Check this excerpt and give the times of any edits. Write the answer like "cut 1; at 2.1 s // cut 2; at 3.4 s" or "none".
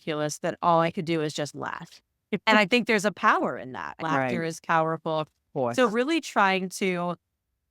cut 1; at 4.0 s